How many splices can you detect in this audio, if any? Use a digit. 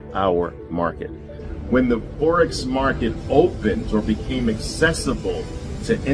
1